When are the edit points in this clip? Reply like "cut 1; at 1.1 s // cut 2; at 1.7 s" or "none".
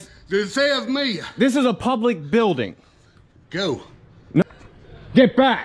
cut 1; at 4.4 s